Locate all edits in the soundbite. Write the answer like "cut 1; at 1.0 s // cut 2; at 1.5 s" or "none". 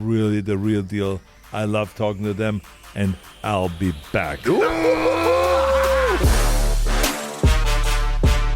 cut 1; at 6.2 s